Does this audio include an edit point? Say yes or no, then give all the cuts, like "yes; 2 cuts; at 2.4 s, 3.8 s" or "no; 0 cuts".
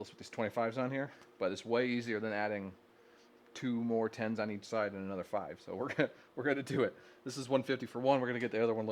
no; 0 cuts